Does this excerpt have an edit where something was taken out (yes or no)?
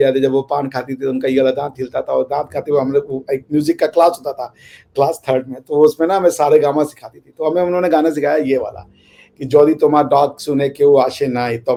no